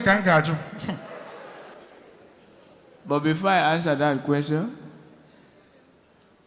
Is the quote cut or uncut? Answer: cut